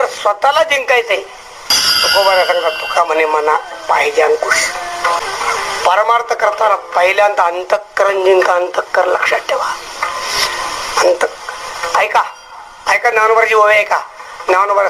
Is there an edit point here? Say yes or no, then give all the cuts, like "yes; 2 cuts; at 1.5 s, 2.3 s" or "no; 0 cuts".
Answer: yes; 2 cuts; at 1.8 s, 5.2 s